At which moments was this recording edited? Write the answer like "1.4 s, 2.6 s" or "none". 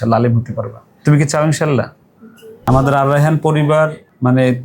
2.6 s